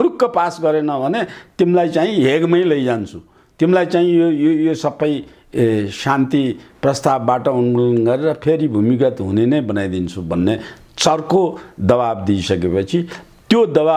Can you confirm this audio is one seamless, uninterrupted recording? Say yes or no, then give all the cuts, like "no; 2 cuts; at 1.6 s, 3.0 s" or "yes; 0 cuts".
yes; 0 cuts